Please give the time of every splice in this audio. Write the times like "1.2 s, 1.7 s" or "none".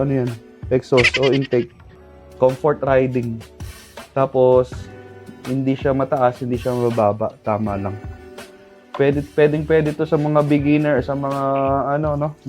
1.8 s